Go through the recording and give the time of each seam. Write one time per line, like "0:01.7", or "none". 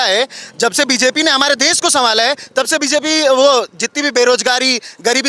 none